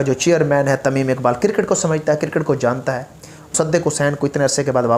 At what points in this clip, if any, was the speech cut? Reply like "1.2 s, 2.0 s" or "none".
3.5 s